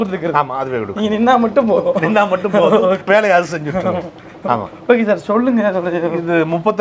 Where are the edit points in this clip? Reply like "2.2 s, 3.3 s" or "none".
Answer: none